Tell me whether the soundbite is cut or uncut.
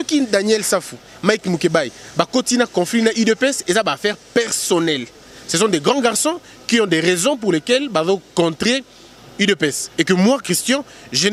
uncut